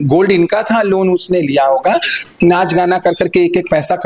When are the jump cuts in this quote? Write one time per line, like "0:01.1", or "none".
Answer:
0:02.2